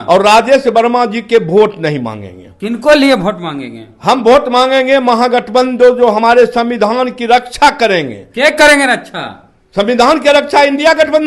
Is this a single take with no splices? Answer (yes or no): yes